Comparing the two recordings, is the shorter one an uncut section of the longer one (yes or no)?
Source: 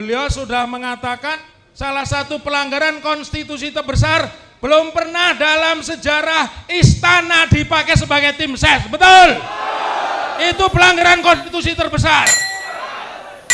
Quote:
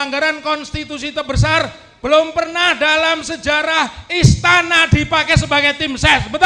yes